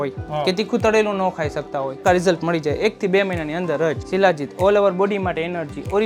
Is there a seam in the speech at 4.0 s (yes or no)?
yes